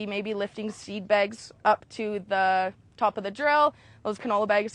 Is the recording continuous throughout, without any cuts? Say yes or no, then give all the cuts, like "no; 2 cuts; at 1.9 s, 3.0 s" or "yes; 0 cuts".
yes; 0 cuts